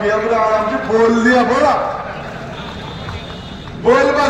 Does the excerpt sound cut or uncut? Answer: uncut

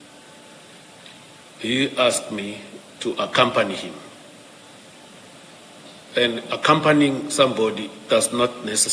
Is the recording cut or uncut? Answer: uncut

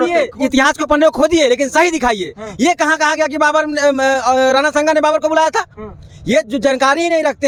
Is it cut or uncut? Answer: uncut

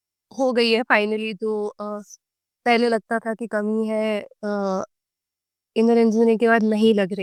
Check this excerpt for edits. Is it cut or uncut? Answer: uncut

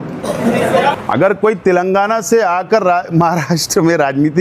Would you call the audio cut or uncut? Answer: cut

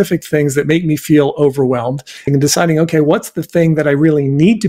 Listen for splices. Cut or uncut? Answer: cut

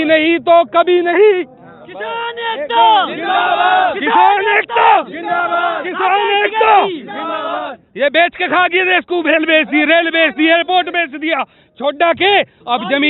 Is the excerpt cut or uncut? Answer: uncut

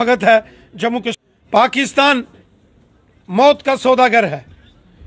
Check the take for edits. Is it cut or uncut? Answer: cut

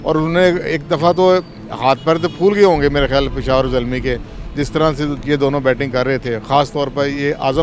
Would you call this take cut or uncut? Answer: uncut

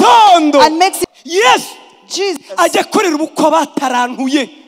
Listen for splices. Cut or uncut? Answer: cut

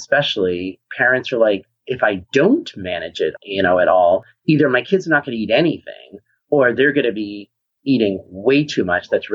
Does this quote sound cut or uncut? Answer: cut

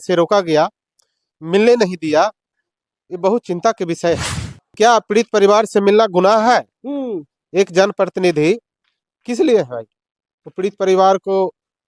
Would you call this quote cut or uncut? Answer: cut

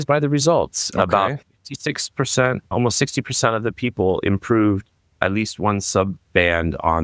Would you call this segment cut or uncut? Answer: uncut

